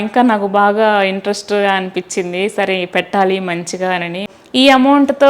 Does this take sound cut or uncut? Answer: cut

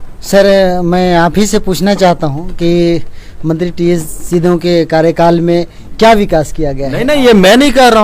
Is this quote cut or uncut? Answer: uncut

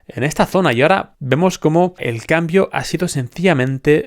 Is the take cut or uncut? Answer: cut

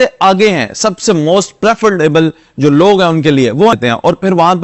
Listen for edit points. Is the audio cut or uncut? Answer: cut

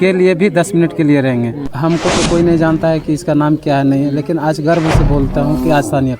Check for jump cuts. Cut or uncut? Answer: cut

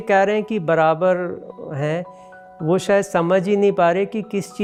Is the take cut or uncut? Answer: uncut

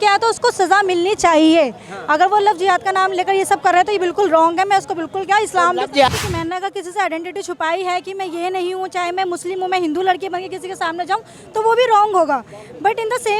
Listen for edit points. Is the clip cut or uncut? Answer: cut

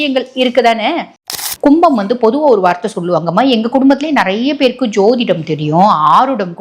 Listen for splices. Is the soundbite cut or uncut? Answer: cut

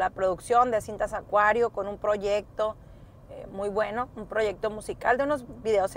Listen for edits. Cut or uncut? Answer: uncut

